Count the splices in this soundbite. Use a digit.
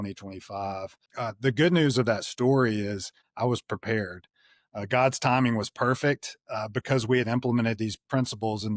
1